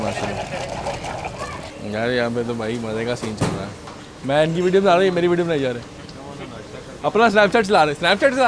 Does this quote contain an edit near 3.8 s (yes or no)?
yes